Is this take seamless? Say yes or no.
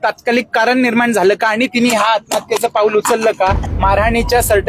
no